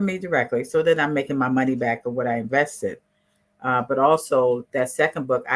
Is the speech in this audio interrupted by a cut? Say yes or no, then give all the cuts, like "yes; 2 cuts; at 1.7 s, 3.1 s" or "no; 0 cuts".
no; 0 cuts